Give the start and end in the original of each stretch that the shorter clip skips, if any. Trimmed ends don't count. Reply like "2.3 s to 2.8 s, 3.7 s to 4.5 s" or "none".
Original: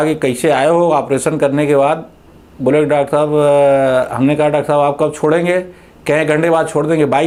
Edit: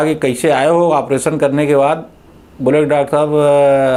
none